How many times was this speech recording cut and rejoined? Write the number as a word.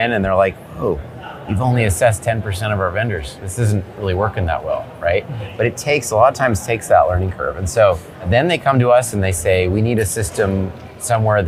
zero